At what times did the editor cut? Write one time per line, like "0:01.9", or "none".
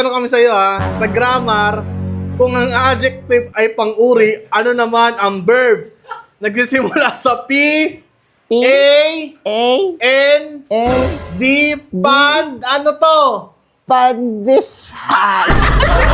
none